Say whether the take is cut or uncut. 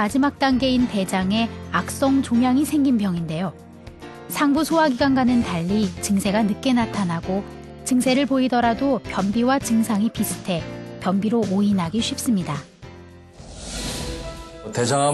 uncut